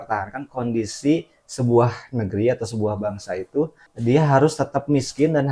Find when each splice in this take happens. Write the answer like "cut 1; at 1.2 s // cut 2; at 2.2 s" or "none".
cut 1; at 3.8 s